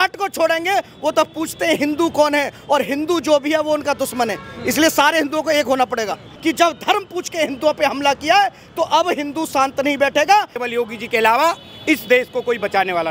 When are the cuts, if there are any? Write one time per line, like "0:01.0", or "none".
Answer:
0:06.3
0:10.6